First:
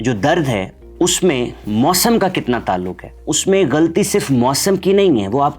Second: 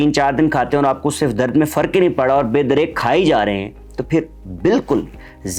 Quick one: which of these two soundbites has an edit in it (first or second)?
first